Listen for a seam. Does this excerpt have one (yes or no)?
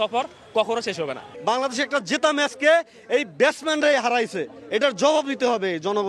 no